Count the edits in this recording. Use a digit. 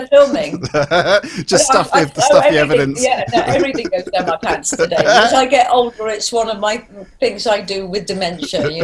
1